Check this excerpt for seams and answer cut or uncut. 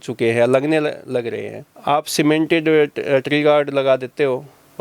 cut